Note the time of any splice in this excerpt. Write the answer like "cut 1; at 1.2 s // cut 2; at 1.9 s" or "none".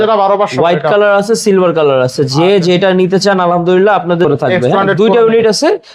cut 1; at 4.2 s